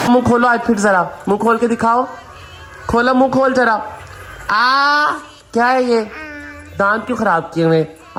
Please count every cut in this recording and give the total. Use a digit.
0